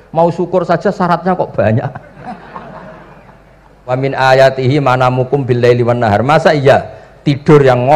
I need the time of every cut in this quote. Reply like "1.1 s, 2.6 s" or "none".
4.0 s